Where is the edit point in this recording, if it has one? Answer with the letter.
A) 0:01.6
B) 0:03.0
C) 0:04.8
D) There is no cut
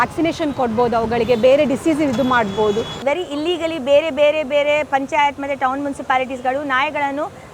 B